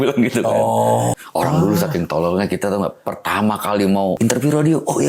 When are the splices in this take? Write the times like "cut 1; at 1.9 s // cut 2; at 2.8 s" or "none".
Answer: cut 1; at 1.1 s // cut 2; at 4.2 s